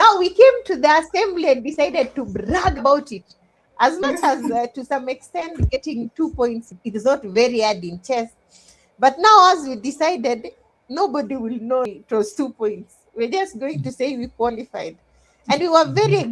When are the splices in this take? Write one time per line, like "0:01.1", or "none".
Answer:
0:11.9